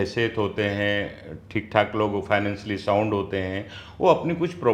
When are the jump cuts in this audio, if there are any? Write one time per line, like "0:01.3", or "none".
none